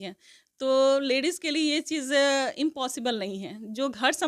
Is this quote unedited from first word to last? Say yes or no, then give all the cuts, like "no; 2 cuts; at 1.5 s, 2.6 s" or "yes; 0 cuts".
yes; 0 cuts